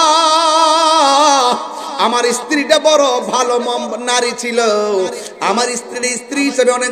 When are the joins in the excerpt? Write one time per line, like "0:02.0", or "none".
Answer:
none